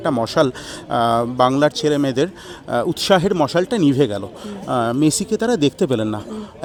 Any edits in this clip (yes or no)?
no